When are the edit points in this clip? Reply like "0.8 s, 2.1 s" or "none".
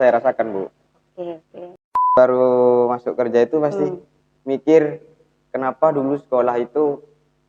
2.1 s